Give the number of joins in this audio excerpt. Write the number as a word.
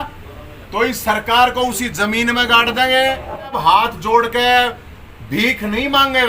one